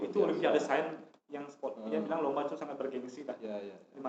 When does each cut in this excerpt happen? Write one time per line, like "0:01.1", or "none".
none

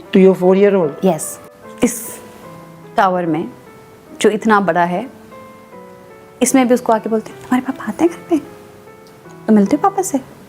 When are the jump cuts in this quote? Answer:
none

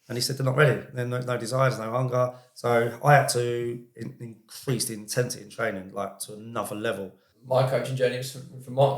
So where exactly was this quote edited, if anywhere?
0:07.3

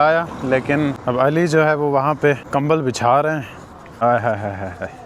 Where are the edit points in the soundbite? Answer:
0:01.0
0:02.4
0:04.0

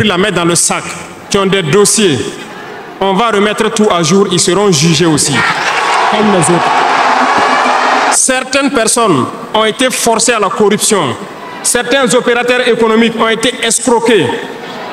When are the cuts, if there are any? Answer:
0:08.2

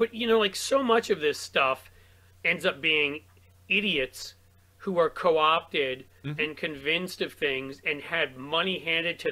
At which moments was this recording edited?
none

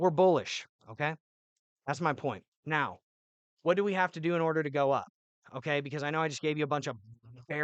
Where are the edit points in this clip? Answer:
0:02.5

